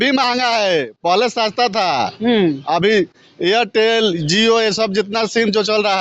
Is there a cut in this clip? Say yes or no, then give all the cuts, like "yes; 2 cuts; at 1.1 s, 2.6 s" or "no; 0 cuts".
no; 0 cuts